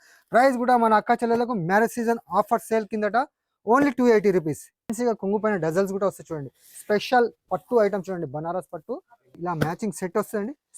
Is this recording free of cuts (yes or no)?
no